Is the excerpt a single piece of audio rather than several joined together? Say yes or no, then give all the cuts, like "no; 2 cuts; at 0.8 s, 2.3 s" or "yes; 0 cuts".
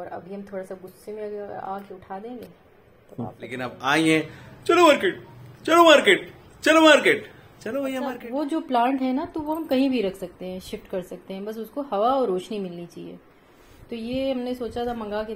no; 2 cuts; at 3.6 s, 8.2 s